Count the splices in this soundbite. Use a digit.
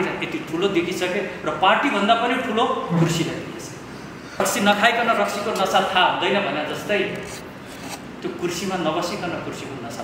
1